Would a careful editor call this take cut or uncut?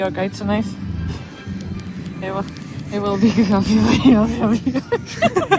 uncut